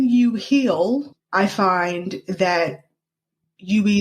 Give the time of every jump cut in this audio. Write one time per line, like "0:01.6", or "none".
0:01.1